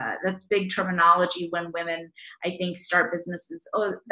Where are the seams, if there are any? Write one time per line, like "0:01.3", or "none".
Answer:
none